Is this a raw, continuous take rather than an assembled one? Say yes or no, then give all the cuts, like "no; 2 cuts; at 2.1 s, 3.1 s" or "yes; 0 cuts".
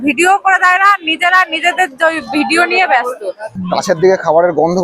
no; 1 cut; at 3.5 s